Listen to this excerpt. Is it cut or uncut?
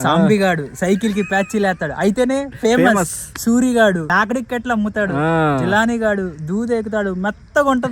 cut